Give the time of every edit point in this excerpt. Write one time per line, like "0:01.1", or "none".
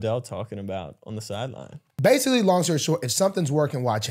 0:01.9